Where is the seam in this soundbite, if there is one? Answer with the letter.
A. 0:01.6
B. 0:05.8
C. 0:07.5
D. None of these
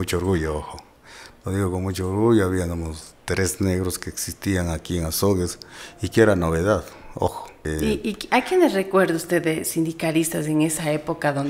C